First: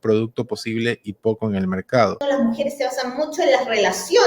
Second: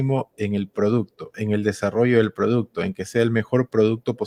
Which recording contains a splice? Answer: first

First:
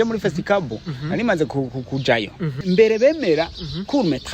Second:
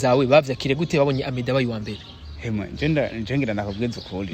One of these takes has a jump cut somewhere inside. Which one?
first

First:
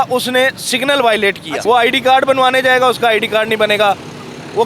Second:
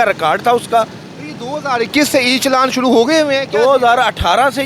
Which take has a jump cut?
first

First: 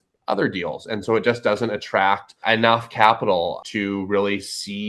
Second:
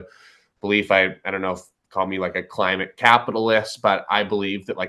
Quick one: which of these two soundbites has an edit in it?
first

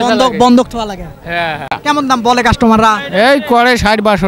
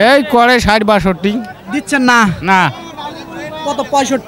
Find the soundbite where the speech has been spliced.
first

